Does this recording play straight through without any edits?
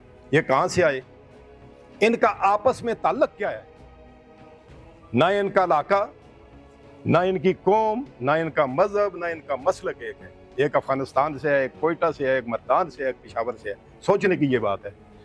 yes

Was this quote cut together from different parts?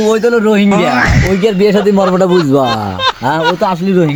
no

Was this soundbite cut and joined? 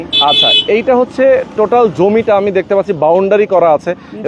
no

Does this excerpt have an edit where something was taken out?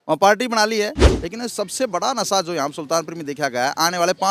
yes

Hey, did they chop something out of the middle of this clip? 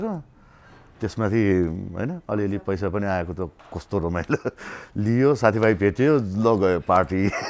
no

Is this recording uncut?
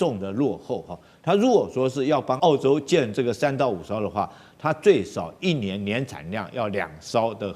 no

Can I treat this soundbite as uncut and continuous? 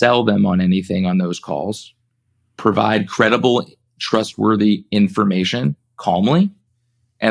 yes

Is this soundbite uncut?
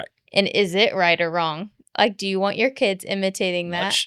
yes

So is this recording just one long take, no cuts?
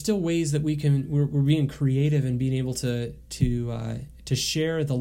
yes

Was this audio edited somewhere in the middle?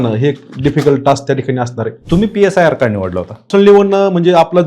yes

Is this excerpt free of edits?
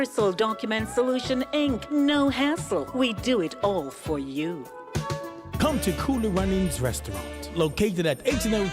no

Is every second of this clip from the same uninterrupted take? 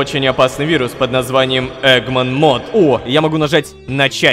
no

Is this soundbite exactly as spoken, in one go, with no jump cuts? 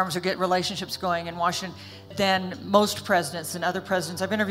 no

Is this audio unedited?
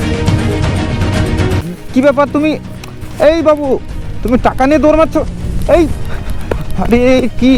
yes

